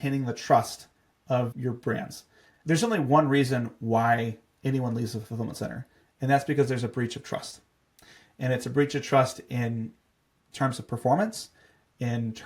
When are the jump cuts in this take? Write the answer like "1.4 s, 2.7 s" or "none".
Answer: 1.9 s